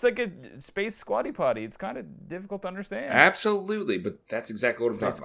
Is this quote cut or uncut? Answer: cut